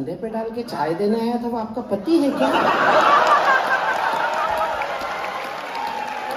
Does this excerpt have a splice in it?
no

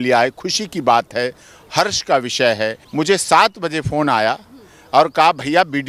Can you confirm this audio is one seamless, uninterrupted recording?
no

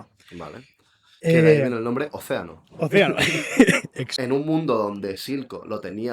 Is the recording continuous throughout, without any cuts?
no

